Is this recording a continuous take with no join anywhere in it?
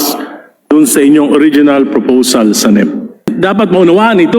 no; 1 cut; at 3.3 s

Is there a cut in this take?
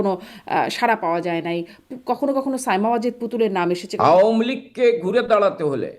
yes; 1 cut; at 3.9 s

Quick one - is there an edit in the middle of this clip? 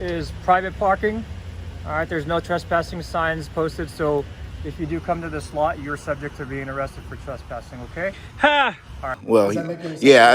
yes; 1 cut; at 9.1 s

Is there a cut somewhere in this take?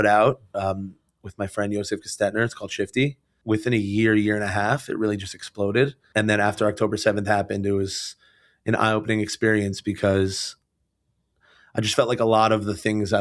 yes; 2 cuts; at 3.3 s, 6.0 s

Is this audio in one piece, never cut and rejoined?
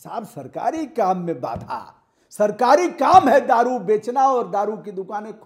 yes; 0 cuts

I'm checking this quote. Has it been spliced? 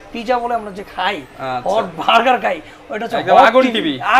no; 0 cuts

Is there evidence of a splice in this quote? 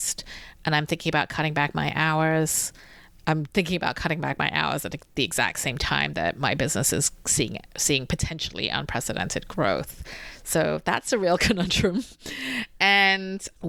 no; 0 cuts

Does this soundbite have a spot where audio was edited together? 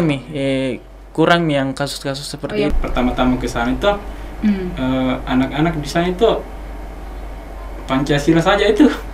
yes; 1 cut; at 2.7 s

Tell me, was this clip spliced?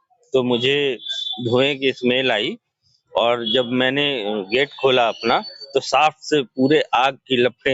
no; 0 cuts

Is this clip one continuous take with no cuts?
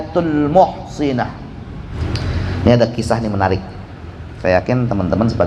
no; 1 cut; at 1.9 s

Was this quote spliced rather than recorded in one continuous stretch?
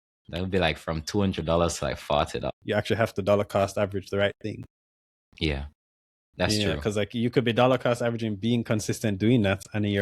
yes; 1 cut; at 2.5 s

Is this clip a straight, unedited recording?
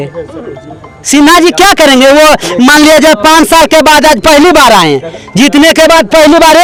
yes; 0 cuts

